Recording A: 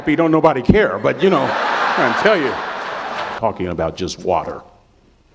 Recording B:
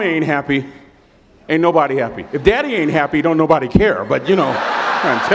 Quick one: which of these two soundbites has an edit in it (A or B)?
A